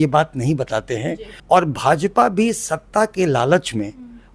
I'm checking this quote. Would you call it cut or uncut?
cut